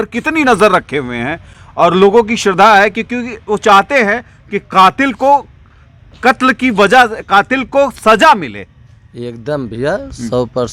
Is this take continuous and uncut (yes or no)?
yes